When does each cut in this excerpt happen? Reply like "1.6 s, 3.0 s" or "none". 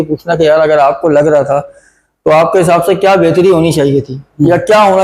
none